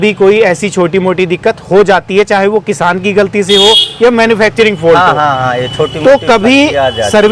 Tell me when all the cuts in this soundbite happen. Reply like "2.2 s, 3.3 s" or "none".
none